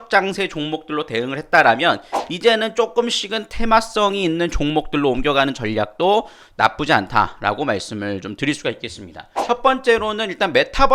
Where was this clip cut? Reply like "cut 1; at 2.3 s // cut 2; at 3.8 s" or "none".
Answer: cut 1; at 9.3 s